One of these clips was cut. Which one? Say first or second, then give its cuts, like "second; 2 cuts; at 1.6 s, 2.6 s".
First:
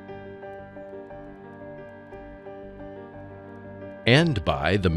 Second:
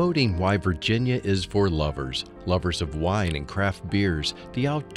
first; 1 cut; at 4.1 s